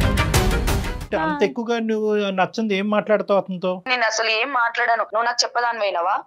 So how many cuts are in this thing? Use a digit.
3